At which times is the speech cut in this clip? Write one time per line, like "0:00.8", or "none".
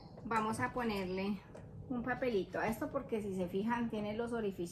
none